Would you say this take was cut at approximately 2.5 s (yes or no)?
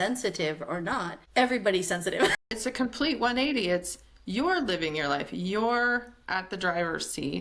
yes